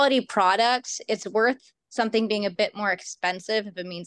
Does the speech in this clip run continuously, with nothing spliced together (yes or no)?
yes